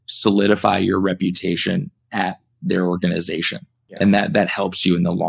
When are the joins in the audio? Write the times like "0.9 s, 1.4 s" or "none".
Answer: none